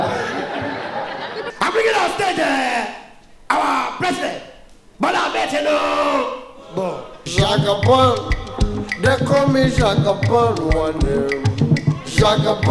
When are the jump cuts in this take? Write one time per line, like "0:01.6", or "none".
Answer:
0:01.5
0:07.2

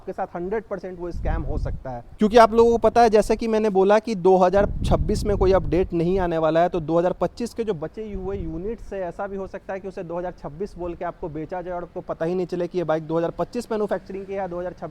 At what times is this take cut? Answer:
none

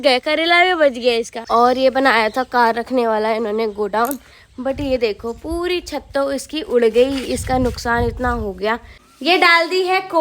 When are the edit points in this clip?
0:01.4
0:09.0

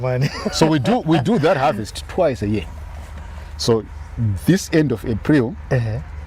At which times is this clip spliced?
none

